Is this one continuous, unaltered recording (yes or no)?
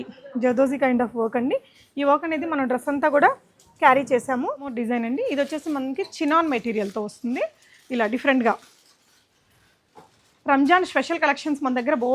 no